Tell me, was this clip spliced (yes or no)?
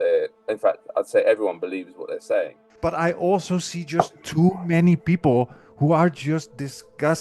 yes